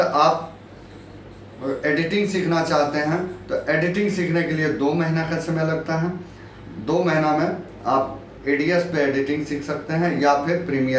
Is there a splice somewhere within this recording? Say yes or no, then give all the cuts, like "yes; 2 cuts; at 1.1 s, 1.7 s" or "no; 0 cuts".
no; 0 cuts